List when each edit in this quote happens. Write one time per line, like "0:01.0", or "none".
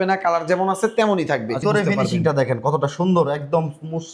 0:01.6